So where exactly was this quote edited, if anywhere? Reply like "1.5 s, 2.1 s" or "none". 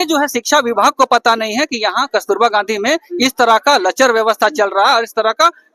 none